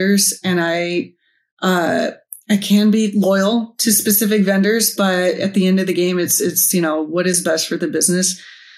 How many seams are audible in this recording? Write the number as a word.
zero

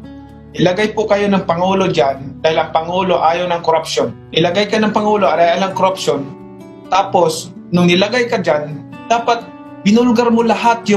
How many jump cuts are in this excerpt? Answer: one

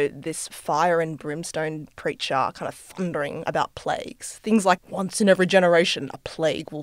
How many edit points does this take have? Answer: one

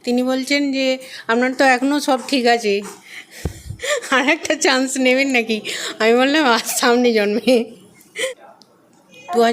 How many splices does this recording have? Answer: one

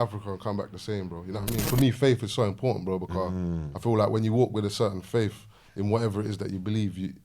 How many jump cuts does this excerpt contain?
one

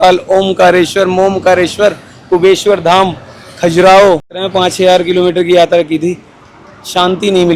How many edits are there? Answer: one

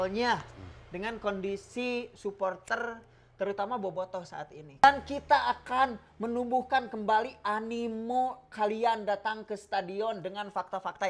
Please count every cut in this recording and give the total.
one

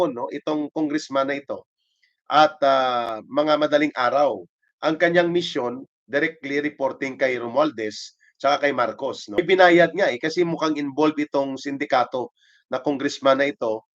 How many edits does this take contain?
one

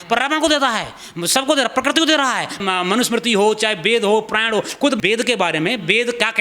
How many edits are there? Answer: two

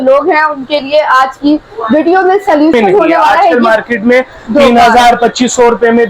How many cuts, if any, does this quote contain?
one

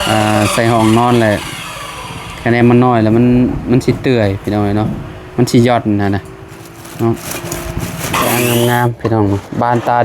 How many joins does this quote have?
one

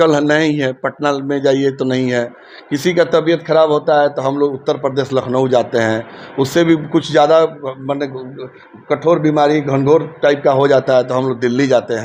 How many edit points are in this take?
zero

